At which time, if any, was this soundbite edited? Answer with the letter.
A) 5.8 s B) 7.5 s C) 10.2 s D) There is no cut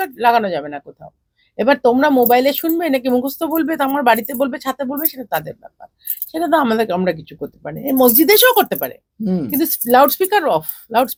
D